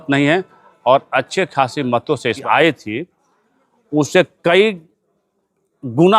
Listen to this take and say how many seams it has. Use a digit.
1